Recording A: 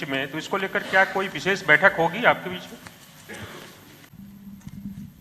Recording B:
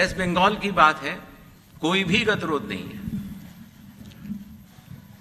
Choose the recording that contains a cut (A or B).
A